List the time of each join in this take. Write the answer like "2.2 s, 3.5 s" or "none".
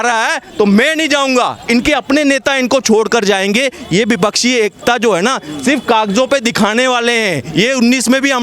none